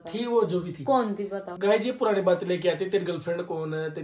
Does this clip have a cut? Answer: yes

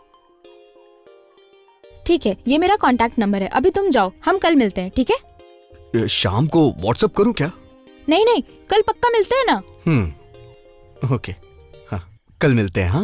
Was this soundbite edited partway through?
no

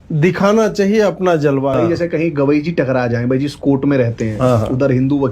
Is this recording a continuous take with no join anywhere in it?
no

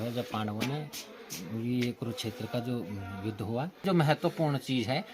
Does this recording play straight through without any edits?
no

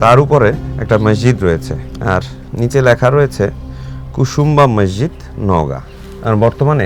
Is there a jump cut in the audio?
no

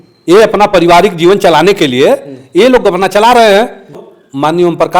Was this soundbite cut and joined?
yes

